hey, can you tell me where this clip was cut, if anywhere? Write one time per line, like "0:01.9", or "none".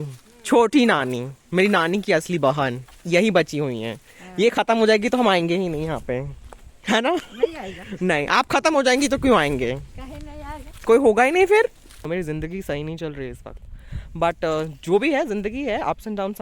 0:12.0